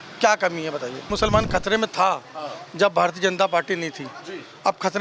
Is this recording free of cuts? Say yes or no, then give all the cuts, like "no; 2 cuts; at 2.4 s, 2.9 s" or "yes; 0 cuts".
no; 1 cut; at 1.1 s